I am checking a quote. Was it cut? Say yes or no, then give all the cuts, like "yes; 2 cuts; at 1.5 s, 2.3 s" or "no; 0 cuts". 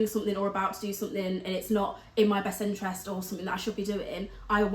no; 0 cuts